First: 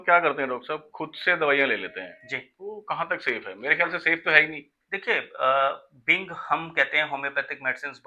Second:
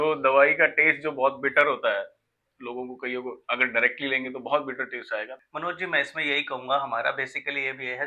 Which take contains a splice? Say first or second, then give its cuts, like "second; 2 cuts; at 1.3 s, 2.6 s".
second; 1 cut; at 5.4 s